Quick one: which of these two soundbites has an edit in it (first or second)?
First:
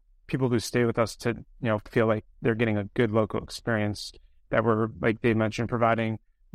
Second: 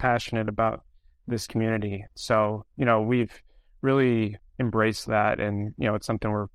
second